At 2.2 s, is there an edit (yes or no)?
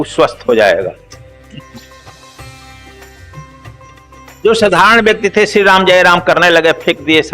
yes